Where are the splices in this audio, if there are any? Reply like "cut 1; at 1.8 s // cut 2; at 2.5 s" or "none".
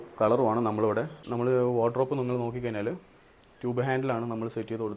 cut 1; at 1.2 s